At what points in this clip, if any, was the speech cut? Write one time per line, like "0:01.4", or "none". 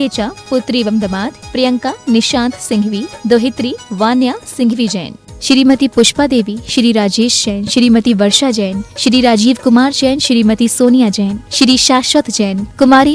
0:08.2